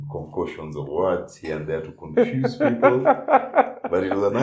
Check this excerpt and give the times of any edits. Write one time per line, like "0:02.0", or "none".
none